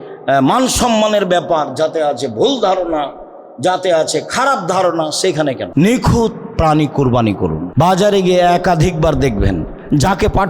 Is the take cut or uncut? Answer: cut